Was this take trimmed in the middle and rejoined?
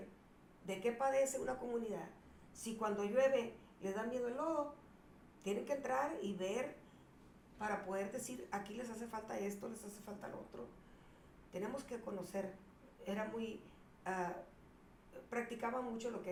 no; 0 cuts

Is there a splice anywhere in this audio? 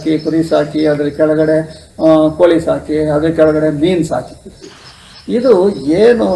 no; 0 cuts

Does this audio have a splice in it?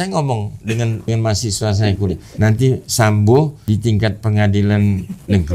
yes; 3 cuts; at 1.1 s, 2.3 s, 3.6 s

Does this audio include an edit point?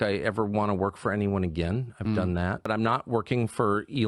yes; 1 cut; at 2.7 s

